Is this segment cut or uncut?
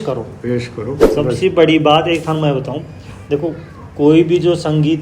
cut